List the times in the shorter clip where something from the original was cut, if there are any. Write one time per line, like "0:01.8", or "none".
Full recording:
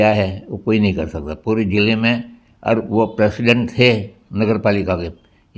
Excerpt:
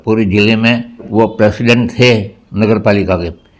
0:01.1